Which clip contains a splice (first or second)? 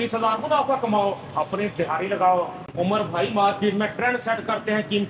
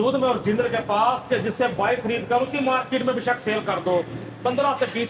first